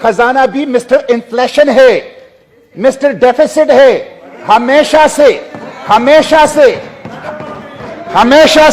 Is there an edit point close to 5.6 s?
no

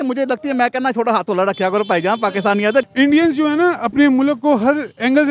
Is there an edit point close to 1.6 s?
no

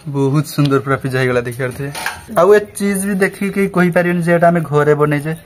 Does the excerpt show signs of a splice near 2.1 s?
yes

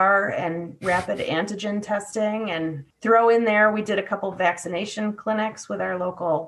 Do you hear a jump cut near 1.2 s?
no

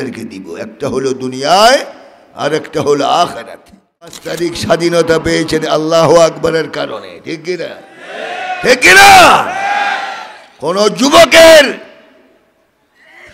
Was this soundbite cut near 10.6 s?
no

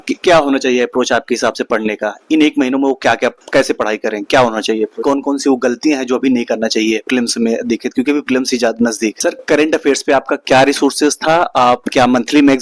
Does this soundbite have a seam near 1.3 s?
no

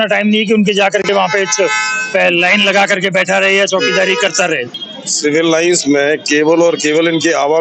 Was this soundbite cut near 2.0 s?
no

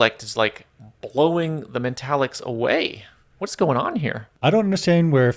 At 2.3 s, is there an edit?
no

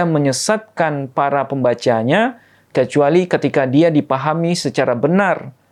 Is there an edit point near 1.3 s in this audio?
no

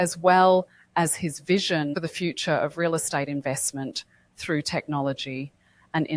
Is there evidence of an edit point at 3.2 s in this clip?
no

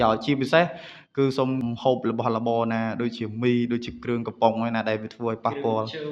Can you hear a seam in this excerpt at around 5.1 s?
no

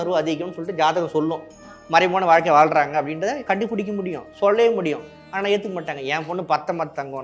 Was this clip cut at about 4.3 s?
no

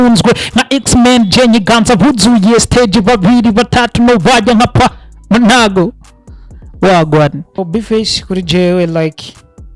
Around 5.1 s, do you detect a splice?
no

